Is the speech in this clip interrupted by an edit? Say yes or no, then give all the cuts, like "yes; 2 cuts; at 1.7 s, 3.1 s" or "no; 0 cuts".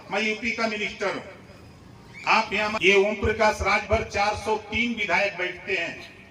yes; 1 cut; at 2.8 s